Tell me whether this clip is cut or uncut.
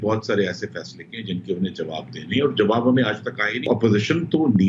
cut